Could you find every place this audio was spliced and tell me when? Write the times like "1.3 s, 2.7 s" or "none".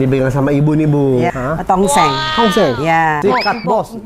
1.3 s, 3.2 s